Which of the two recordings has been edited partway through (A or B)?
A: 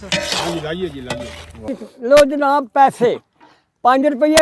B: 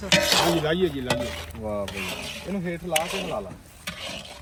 A